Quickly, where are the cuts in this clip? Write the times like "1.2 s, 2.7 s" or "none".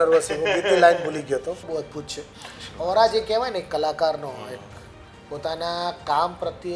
1.6 s